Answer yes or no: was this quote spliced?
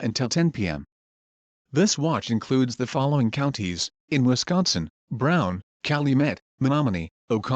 yes